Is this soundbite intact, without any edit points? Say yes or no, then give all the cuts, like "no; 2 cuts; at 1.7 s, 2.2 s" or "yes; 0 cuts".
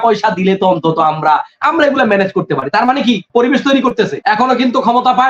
no; 2 cuts; at 3.2 s, 4.2 s